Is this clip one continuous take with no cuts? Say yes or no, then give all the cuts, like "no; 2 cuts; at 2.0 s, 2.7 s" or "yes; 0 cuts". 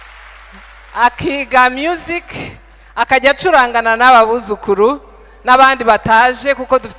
yes; 0 cuts